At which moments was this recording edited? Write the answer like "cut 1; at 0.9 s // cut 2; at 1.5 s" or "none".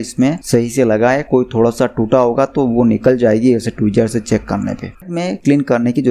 cut 1; at 5.0 s